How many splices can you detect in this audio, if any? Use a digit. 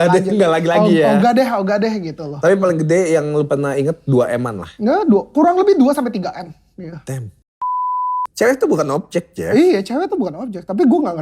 1